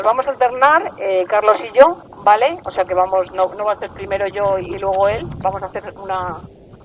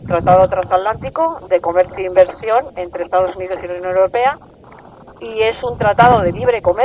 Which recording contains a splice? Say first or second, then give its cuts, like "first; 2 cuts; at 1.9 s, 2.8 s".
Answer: second; 1 cut; at 1.7 s